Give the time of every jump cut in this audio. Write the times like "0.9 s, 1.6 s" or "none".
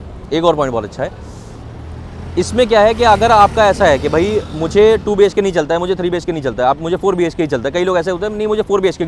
none